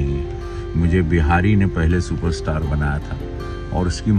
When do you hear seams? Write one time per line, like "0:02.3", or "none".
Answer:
none